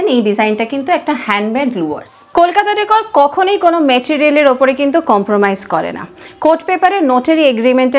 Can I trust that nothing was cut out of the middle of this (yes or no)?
yes